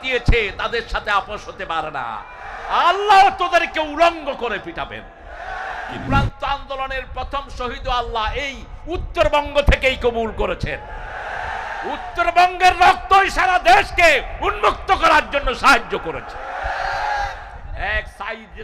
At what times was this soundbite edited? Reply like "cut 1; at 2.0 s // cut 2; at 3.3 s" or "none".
cut 1; at 6.0 s